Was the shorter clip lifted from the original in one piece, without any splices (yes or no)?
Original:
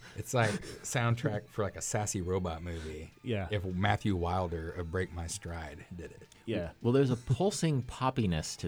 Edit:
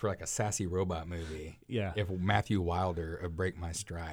yes